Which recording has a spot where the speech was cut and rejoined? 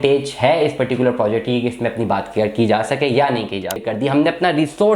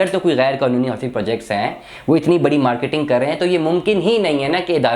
first; 1 cut; at 3.8 s

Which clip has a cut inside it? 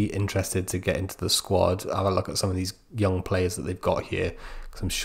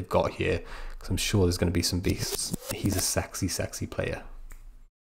second; 1 cut; at 2.5 s

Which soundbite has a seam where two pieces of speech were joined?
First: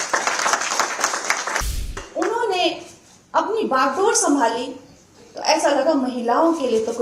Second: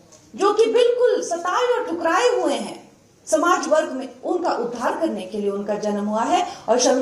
first; 1 cut; at 2.0 s

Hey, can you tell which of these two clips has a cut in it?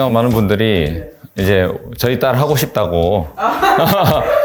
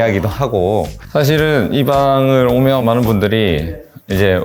second; 1 cut; at 1.0 s

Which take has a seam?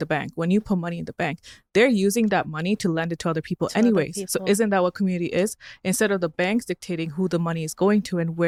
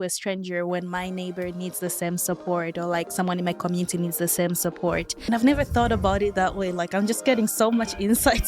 second; 1 cut; at 5.2 s

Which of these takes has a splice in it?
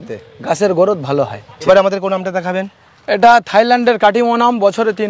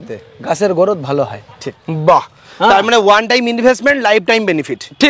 second; 1 cut; at 1.5 s

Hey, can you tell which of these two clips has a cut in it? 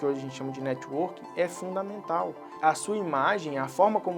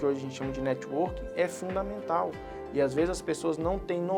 first; 1 cut; at 2.6 s

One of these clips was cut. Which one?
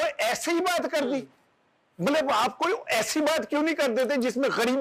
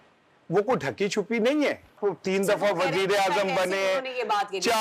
second; 1 cut; at 2.0 s

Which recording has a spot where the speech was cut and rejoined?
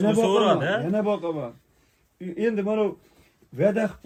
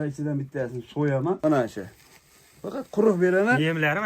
second; 1 cut; at 1.4 s

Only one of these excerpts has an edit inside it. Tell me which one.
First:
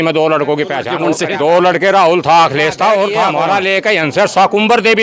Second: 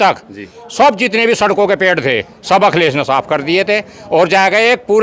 first; 2 cuts; at 0.9 s, 3.4 s

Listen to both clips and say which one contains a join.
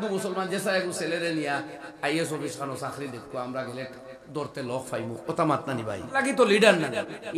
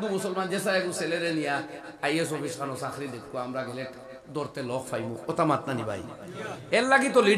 first; 1 cut; at 6.1 s

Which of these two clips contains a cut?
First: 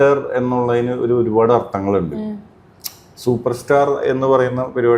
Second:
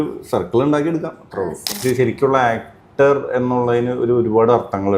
second; 1 cut; at 1.8 s

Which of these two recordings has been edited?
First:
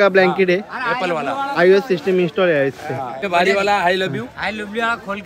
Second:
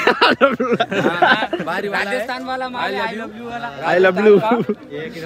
first; 1 cut; at 3.3 s

